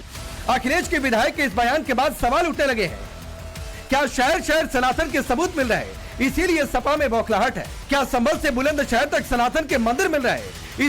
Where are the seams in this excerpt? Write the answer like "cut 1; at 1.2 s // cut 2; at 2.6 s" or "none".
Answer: cut 1; at 6.7 s